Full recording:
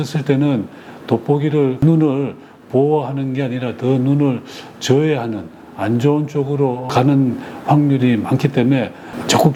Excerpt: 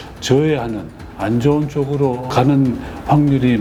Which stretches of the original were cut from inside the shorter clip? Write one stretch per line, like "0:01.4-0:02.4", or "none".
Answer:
none